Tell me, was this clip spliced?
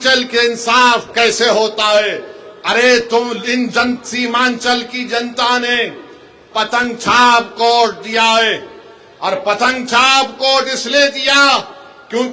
no; 0 cuts

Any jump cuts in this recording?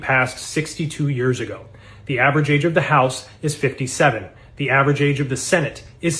no; 0 cuts

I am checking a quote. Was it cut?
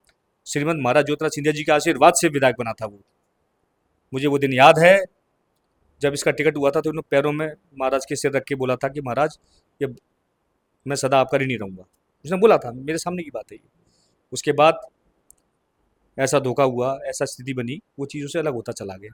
no; 0 cuts

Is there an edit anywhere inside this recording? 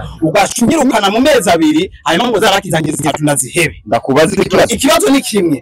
no; 0 cuts

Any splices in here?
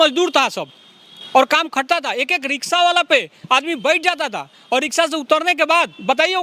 no; 0 cuts

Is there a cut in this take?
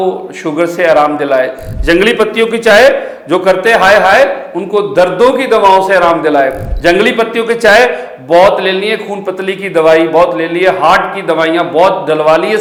no; 0 cuts

